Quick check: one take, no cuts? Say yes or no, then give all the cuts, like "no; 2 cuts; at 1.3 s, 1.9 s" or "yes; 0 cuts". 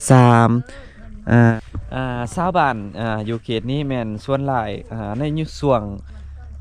no; 1 cut; at 1.5 s